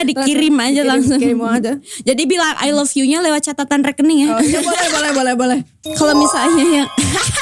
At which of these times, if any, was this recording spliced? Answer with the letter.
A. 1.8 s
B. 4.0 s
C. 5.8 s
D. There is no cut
C